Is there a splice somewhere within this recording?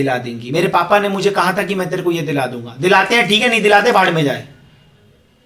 no; 0 cuts

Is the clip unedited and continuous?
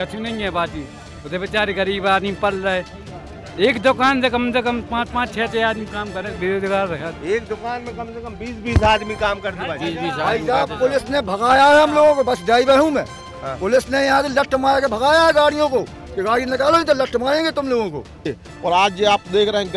no; 1 cut; at 18.4 s

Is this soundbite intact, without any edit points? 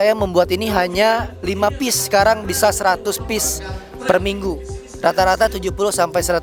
yes; 0 cuts

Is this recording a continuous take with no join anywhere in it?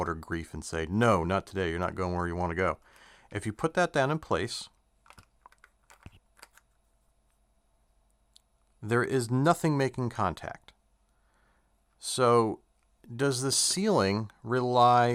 yes; 0 cuts

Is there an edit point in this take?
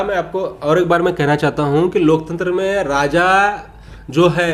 no; 0 cuts

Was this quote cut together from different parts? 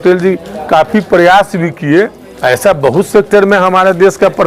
yes; 1 cut; at 2.2 s

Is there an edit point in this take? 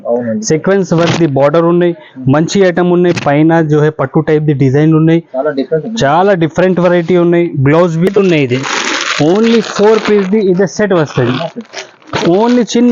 yes; 1 cut; at 8.1 s

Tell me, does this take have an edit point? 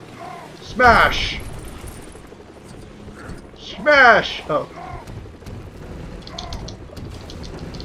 yes; 1 cut; at 5.8 s

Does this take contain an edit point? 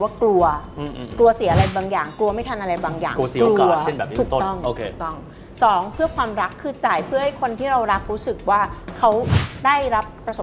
no; 0 cuts

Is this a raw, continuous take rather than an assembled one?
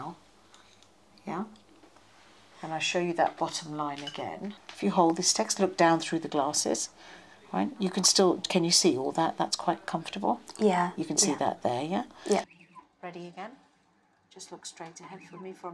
no; 2 cuts; at 4.7 s, 12.5 s

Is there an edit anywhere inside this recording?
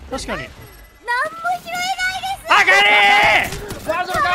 no; 0 cuts

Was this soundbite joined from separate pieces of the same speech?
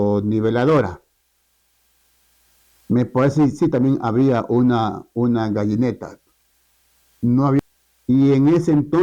yes; 1 cut; at 7.6 s

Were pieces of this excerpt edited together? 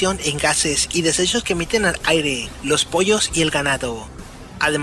yes; 1 cut; at 2.1 s

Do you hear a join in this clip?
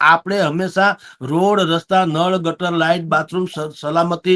no; 0 cuts

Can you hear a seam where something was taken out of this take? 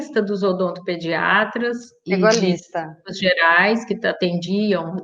no; 0 cuts

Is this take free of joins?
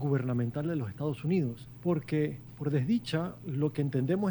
no; 3 cuts; at 1.7 s, 2.5 s, 3.4 s

